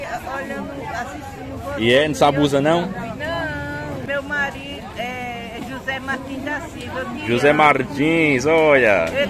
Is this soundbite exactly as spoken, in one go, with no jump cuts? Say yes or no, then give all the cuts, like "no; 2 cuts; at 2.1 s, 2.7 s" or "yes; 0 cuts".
no; 1 cut; at 4.0 s